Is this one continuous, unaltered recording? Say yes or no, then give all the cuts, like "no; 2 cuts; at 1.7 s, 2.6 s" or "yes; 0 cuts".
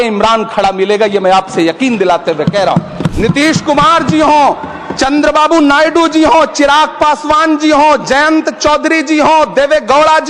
no; 1 cut; at 3.1 s